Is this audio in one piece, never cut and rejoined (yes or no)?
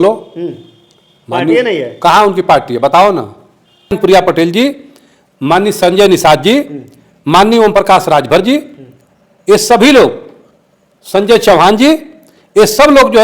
no